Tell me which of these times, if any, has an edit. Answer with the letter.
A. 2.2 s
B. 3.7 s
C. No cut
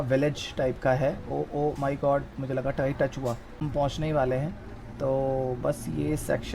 B